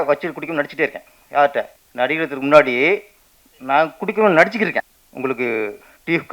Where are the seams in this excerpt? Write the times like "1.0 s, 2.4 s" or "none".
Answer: 1.8 s, 5.0 s